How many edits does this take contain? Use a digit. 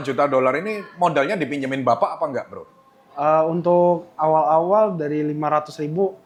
0